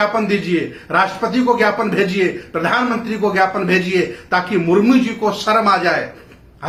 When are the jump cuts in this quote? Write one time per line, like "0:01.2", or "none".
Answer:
none

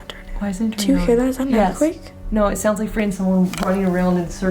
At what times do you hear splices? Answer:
none

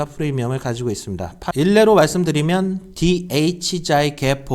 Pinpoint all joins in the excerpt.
0:01.5

